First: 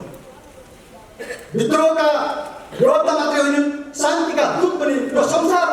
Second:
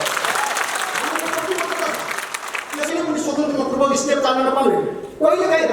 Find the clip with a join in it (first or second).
second